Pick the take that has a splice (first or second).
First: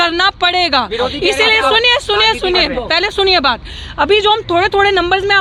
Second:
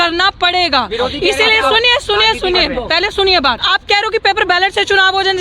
second